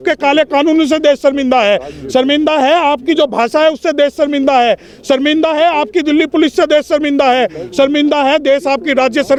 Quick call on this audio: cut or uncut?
uncut